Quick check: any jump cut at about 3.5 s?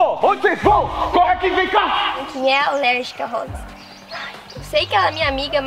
no; 1 cut; at 2.3 s

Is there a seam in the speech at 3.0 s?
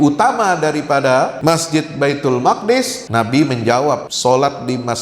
yes; 3 cuts; at 1.4 s, 3.0 s, 4.1 s

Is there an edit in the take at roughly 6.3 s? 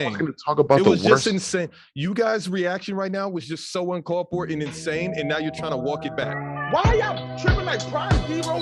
yes; 1 cut; at 6.3 s

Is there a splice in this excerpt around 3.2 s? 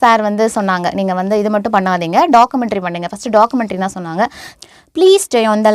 no; 1 cut; at 4.4 s

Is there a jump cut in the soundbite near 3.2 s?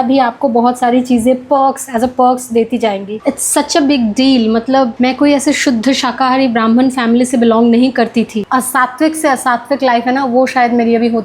yes; 3 cuts; at 3.2 s, 4.9 s, 8.4 s

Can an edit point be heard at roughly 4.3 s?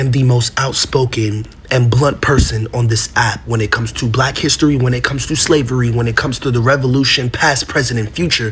no; 0 cuts

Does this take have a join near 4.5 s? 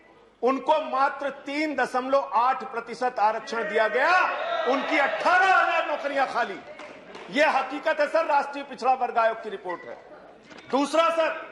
no; 0 cuts

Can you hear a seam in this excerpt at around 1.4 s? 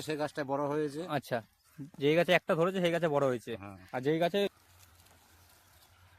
no; 1 cut; at 4.5 s

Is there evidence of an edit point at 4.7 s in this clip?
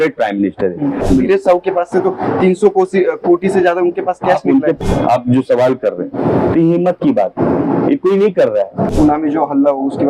yes; 3 cuts; at 1.0 s, 4.7 s, 8.9 s

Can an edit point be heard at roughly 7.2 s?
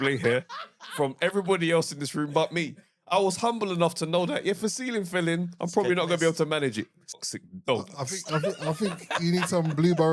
yes; 1 cut; at 7.2 s

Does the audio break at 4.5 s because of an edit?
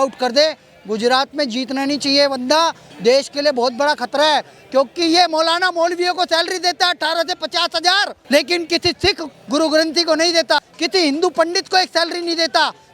no; 2 cuts; at 8.2 s, 10.7 s

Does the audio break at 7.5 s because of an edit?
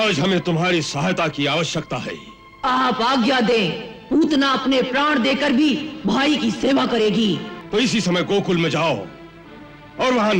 yes; 1 cut; at 7.5 s

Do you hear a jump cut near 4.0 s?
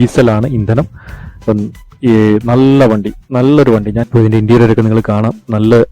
yes; 1 cut; at 4.0 s

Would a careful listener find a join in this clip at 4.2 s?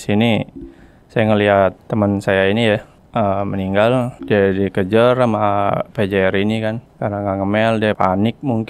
yes; 5 cuts; at 1.8 s, 3.0 s, 4.2 s, 6.9 s, 8.0 s

